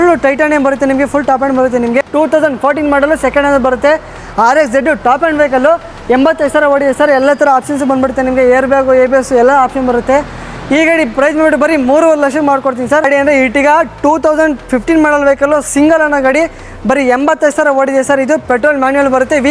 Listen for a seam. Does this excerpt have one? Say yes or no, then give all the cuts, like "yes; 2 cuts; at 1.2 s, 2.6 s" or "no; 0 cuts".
yes; 2 cuts; at 2.0 s, 13.1 s